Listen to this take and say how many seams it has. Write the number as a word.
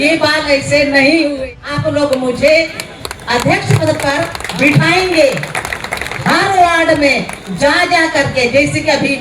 one